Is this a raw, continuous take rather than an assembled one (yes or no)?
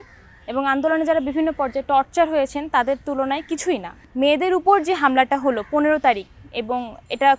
no